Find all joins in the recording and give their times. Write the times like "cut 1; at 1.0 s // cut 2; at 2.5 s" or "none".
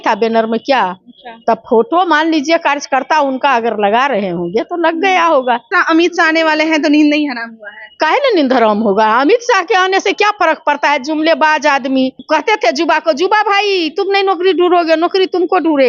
cut 1; at 5.8 s // cut 2; at 12.2 s

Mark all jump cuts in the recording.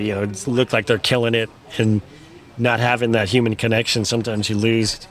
none

